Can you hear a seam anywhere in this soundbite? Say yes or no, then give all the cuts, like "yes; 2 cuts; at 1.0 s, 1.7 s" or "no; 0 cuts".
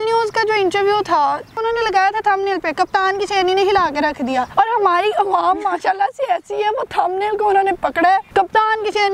yes; 3 cuts; at 1.5 s, 4.5 s, 8.3 s